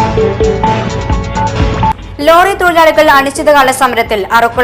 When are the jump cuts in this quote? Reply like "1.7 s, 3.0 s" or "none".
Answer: none

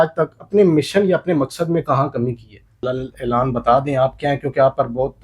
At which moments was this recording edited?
2.8 s

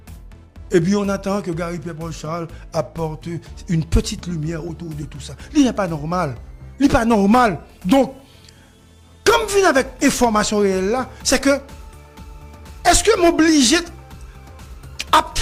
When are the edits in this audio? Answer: none

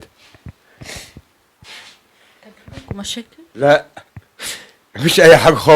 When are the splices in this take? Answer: none

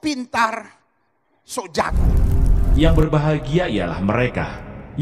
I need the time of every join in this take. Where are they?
2.0 s

